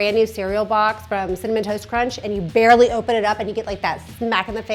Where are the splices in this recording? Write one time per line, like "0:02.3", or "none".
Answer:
none

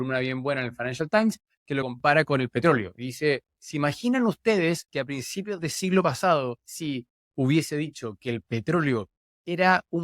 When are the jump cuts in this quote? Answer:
0:01.8
0:06.7

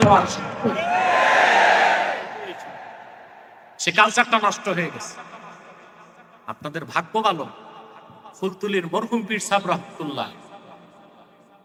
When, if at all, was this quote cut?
none

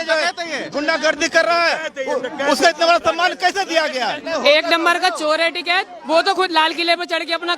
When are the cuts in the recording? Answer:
0:04.2

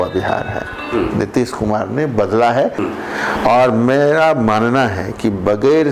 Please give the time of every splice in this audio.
0:02.8

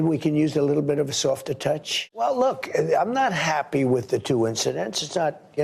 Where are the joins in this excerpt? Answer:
0:02.0

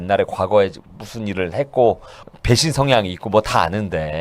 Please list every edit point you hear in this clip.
0:02.3

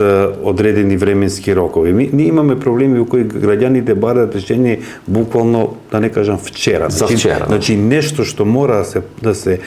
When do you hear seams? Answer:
none

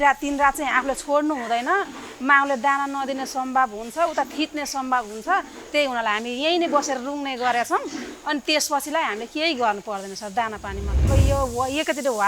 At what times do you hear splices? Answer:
0:11.1

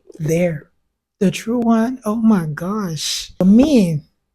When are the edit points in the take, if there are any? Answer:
0:03.4

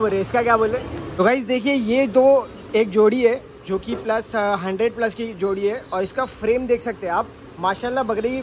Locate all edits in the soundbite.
0:01.2

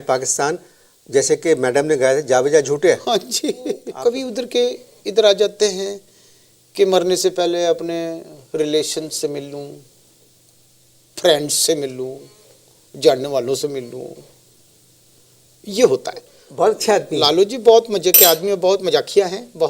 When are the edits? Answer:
0:03.9
0:16.4

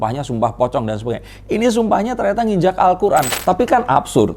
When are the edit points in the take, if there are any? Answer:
0:03.3

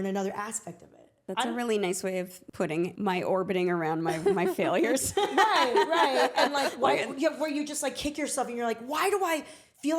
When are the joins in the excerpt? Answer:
0:01.2
0:02.9

